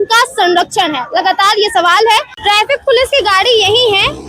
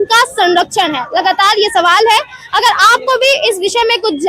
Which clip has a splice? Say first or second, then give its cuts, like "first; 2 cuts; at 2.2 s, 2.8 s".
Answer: first; 1 cut; at 2.3 s